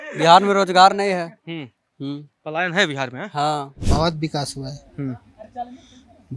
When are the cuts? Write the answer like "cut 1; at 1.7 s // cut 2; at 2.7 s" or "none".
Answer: cut 1; at 3.8 s